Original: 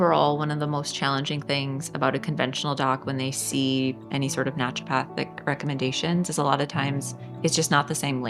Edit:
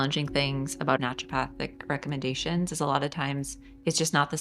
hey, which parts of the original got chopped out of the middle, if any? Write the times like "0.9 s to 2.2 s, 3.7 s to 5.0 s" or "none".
2.1 s to 4.6 s

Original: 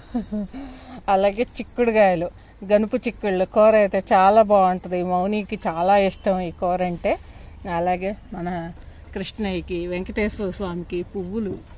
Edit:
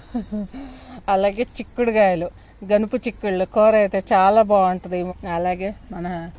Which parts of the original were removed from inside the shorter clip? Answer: 5.1 s to 7.5 s

